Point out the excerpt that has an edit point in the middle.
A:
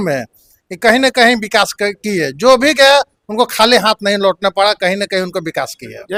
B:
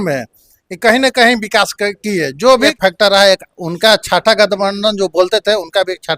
B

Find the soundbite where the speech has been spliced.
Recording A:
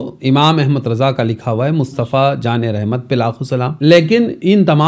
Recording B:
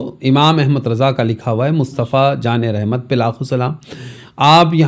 A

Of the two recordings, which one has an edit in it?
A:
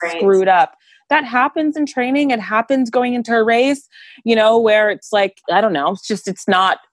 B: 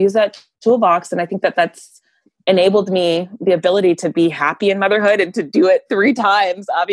A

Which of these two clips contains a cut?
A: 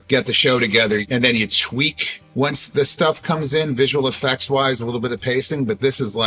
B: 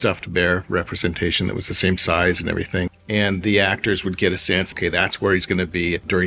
B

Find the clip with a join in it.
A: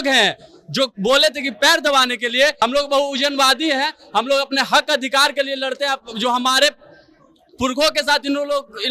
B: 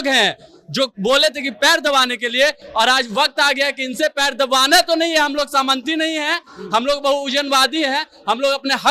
A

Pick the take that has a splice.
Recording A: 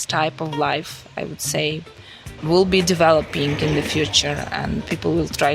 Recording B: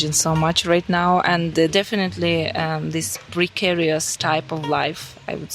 B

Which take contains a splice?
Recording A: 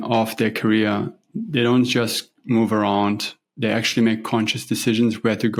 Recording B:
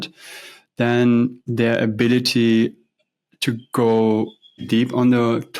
B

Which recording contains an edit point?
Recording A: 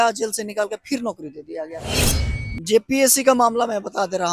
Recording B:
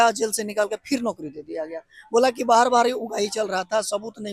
A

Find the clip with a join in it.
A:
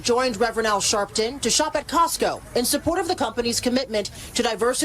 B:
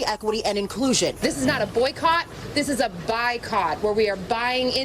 B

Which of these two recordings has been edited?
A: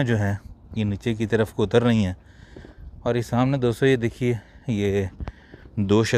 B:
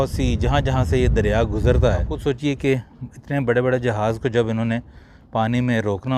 B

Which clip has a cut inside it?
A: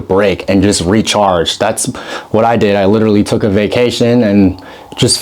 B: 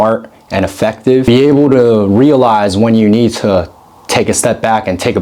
B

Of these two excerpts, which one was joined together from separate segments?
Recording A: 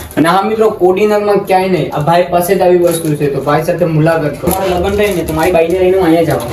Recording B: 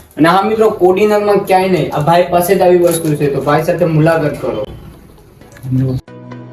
A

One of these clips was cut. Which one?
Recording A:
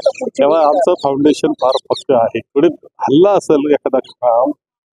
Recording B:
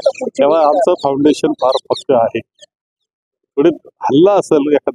A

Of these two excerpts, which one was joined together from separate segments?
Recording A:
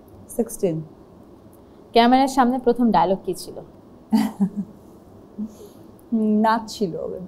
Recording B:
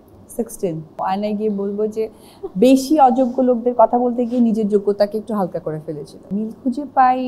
B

